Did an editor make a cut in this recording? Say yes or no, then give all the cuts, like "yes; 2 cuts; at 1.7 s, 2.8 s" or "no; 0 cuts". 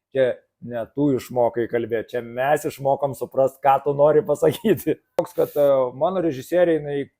yes; 1 cut; at 5.3 s